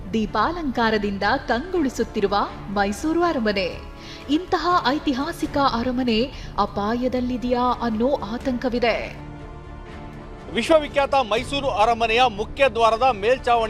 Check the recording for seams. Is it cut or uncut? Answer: uncut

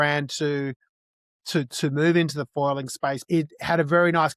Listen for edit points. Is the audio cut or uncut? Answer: cut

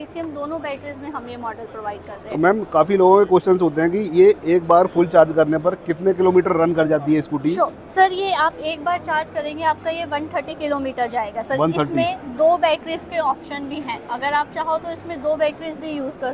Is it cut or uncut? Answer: uncut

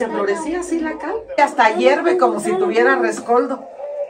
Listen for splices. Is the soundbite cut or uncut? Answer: cut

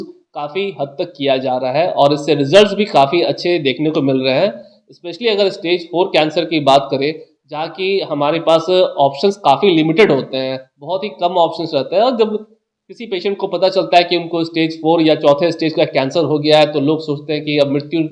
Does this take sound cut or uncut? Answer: uncut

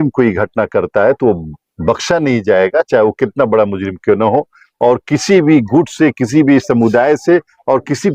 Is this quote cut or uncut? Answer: uncut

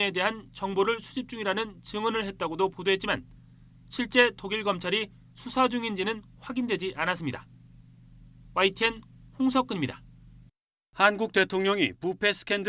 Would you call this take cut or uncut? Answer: cut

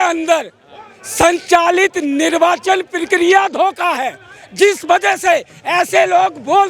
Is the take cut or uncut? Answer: uncut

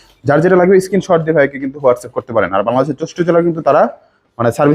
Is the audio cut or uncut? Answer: uncut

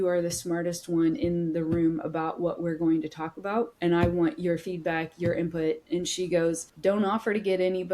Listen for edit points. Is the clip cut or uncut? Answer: cut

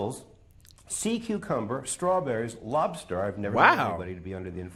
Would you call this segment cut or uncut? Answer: uncut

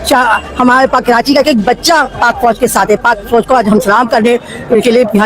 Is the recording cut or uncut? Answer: uncut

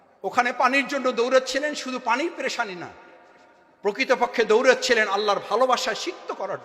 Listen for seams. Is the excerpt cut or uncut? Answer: uncut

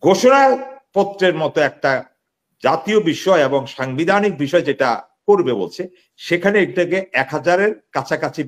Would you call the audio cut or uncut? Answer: uncut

